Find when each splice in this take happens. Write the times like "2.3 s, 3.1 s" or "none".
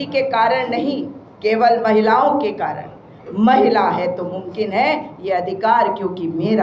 none

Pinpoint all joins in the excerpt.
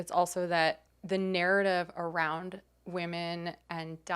0.9 s

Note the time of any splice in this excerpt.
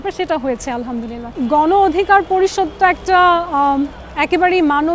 1.2 s

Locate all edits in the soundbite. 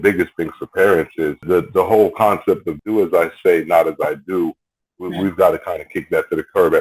1.4 s, 2.7 s

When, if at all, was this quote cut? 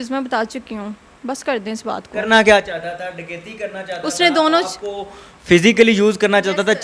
none

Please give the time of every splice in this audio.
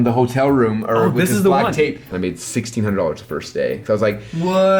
2.1 s

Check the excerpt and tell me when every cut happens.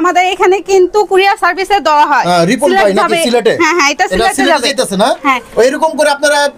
none

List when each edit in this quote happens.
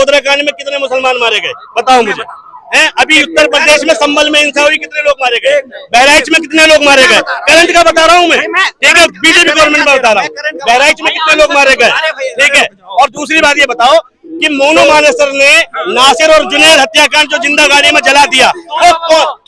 none

